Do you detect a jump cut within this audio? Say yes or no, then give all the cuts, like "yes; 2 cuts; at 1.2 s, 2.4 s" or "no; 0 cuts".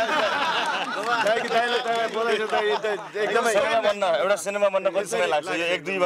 no; 0 cuts